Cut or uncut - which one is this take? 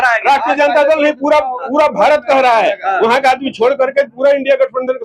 uncut